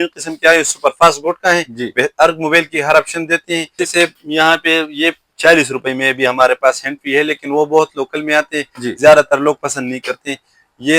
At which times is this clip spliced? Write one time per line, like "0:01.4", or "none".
0:03.4